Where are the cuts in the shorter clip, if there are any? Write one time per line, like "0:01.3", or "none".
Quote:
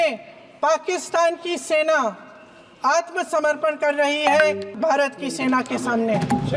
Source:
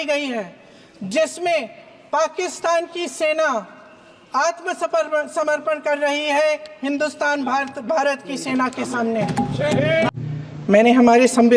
0:03.3
0:04.7